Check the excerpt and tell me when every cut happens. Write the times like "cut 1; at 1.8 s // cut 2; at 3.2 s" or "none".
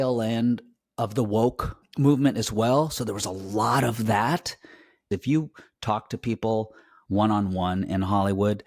cut 1; at 1.8 s // cut 2; at 5.1 s